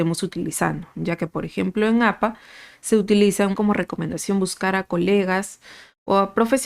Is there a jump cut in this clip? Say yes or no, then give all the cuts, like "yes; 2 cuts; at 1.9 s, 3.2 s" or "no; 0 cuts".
yes; 1 cut; at 3.5 s